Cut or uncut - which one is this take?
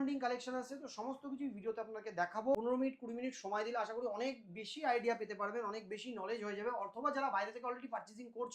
cut